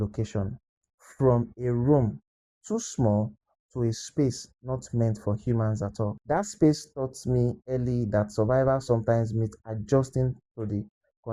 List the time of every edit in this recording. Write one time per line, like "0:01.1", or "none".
0:06.2